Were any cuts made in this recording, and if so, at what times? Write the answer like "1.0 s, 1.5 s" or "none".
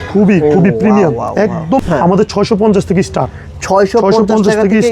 1.8 s